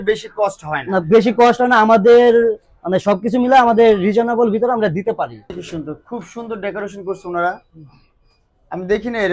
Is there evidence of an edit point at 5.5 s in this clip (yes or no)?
yes